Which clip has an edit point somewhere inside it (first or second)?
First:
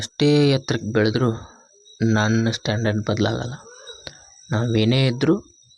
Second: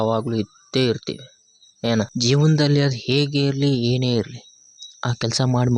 second